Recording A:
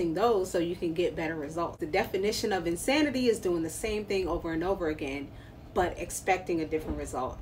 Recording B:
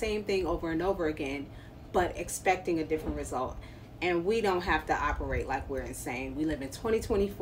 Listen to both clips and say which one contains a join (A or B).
A